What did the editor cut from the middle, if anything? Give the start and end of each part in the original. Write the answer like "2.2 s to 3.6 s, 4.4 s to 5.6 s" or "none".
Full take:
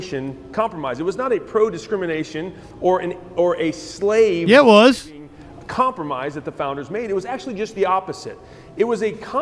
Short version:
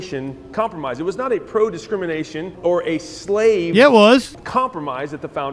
2.5 s to 3.2 s, 5.1 s to 5.6 s